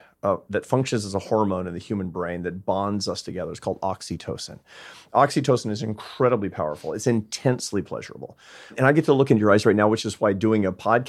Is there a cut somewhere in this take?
yes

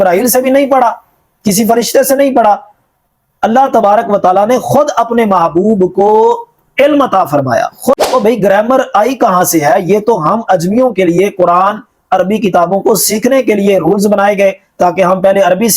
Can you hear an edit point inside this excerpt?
yes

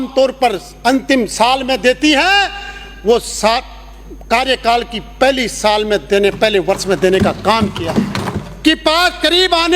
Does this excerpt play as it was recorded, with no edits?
no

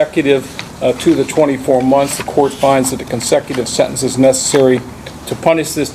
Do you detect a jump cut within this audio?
no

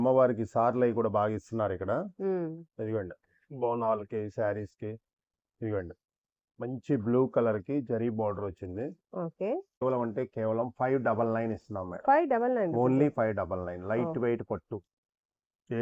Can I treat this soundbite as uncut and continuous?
no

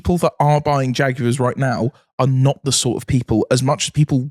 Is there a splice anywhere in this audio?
no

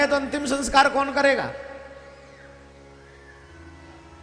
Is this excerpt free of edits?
yes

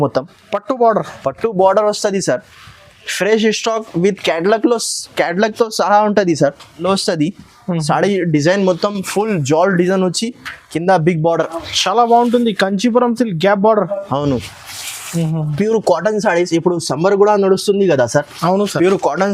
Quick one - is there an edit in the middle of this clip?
yes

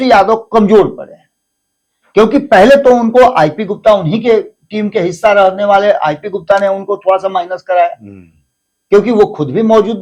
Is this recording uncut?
yes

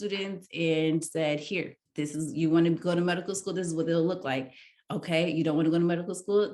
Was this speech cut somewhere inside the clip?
yes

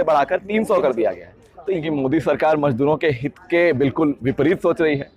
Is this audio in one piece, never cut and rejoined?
no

